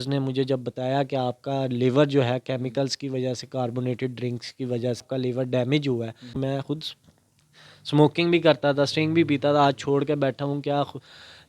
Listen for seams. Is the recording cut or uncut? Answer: cut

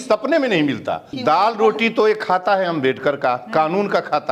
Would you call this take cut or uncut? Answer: cut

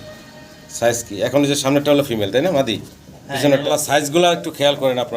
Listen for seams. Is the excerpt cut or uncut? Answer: cut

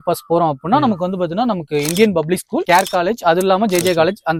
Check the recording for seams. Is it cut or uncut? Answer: uncut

